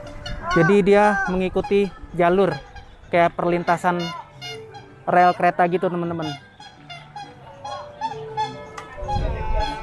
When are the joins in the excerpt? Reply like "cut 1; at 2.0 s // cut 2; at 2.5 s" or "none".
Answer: none